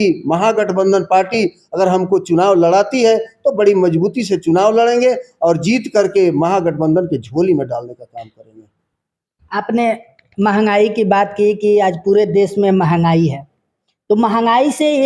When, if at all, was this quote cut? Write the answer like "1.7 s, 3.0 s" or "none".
none